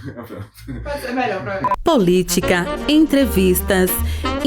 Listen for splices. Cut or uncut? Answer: cut